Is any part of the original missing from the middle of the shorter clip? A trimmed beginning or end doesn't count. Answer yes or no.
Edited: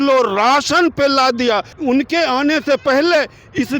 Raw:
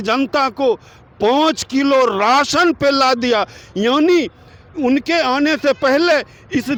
yes